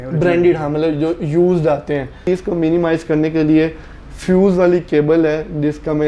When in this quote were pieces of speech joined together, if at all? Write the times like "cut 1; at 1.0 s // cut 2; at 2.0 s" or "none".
cut 1; at 2.2 s